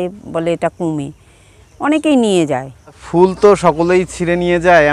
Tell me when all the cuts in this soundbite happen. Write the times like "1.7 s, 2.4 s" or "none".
3.0 s

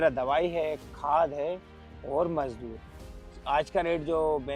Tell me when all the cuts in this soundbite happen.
3.3 s

